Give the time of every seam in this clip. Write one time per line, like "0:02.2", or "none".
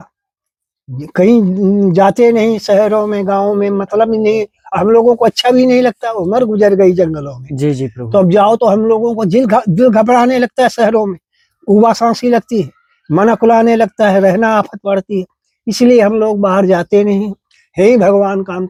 none